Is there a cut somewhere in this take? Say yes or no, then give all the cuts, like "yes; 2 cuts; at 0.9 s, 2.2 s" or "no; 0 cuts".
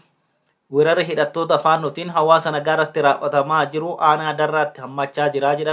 no; 0 cuts